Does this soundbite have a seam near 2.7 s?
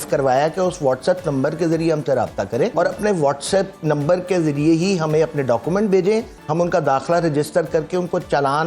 yes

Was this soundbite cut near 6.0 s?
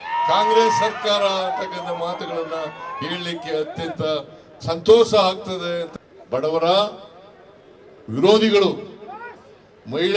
yes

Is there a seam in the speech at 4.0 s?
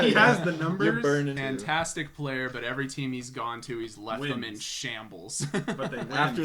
no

